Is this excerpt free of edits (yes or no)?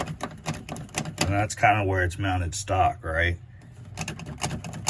yes